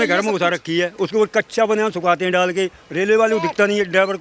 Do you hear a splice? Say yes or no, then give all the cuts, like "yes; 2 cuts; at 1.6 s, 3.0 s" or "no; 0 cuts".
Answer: no; 0 cuts